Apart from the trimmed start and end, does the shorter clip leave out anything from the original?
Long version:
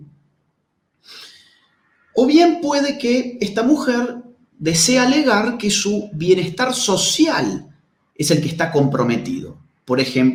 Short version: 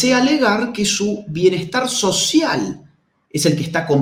no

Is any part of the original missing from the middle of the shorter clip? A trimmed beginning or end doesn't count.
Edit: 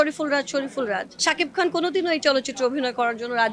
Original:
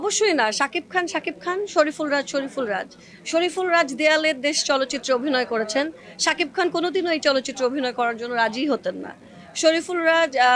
yes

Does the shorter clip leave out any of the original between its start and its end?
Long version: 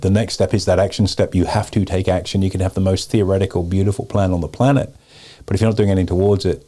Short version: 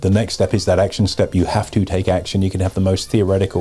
no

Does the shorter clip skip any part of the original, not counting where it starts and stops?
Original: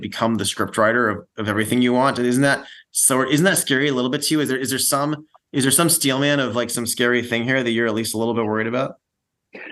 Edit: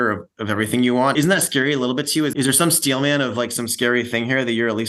yes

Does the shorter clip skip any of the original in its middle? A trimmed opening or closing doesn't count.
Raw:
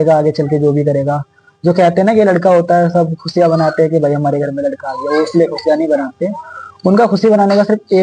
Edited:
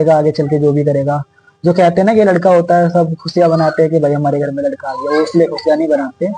no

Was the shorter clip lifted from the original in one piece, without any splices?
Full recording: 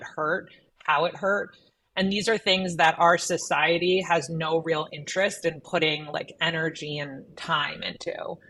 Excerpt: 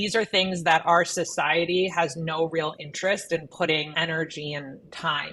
no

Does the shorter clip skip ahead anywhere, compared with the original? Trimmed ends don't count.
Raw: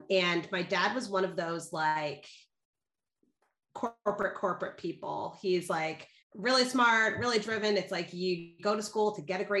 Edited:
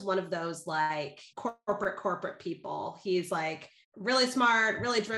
yes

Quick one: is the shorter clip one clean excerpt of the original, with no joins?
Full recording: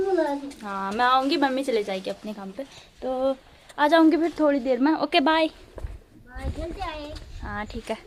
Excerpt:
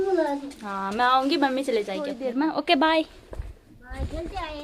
no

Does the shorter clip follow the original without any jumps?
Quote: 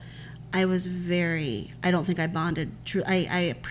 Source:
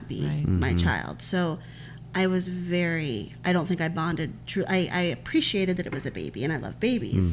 yes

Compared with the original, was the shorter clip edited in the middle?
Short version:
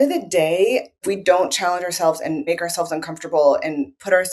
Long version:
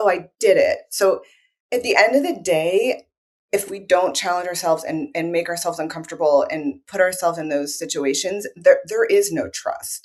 yes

